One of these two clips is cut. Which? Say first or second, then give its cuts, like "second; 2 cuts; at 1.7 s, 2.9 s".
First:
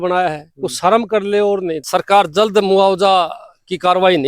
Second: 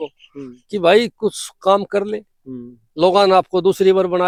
first; 1 cut; at 1.8 s